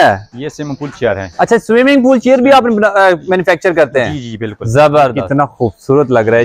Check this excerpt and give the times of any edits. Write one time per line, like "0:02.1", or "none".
0:05.2